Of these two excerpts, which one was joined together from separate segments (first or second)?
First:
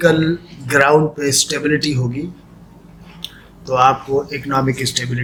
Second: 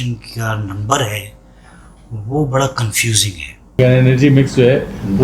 second